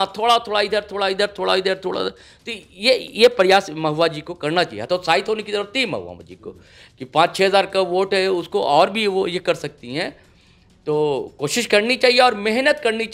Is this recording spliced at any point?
no; 0 cuts

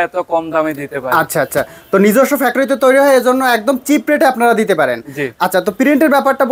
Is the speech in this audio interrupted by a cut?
no; 0 cuts

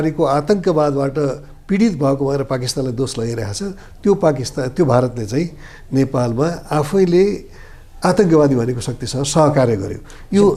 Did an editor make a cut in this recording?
no; 0 cuts

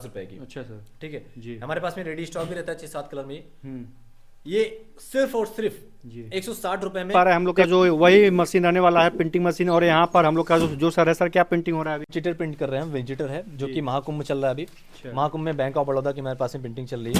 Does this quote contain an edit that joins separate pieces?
yes; 2 cuts; at 7.1 s, 12.1 s

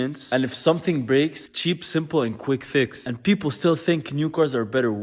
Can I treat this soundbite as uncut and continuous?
yes; 0 cuts

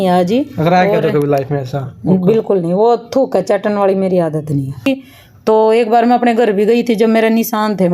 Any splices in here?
yes; 1 cut; at 4.9 s

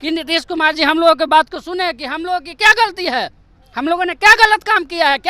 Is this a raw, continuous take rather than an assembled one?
yes; 0 cuts

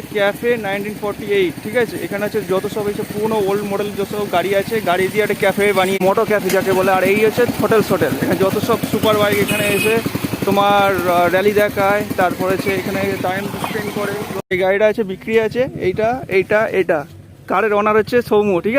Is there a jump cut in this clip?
yes; 2 cuts; at 6.0 s, 14.4 s

